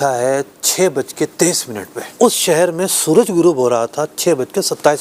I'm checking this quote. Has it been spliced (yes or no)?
yes